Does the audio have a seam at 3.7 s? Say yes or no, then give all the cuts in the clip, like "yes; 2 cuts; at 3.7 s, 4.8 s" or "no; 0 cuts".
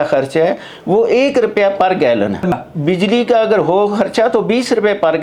no; 1 cut; at 2.5 s